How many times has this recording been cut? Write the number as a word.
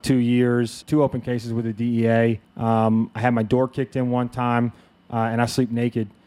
two